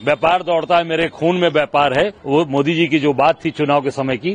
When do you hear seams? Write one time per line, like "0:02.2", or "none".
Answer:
0:02.2